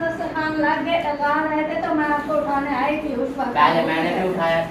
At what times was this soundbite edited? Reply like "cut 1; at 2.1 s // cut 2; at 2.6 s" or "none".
cut 1; at 1.2 s